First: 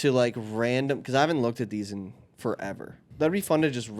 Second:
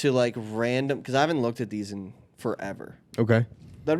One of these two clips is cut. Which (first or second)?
first